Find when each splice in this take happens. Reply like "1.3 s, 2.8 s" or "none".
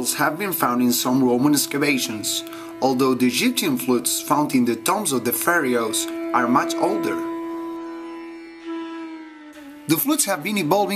none